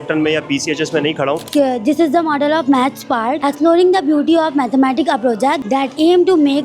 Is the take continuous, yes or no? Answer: no